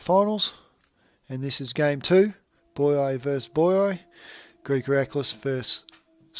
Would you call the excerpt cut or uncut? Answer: cut